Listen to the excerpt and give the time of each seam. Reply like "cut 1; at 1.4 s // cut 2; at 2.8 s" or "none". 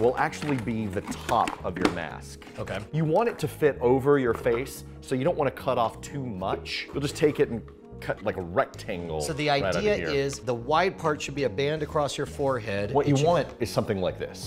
cut 1; at 7.0 s